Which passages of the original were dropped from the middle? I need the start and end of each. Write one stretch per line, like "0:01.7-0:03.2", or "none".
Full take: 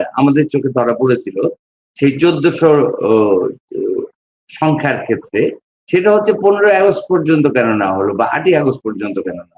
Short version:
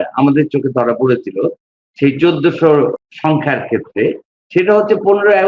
0:03.0-0:04.3